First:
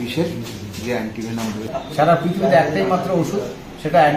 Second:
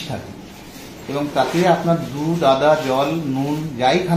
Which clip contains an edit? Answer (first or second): first